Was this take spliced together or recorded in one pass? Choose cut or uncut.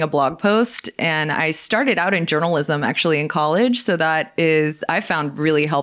uncut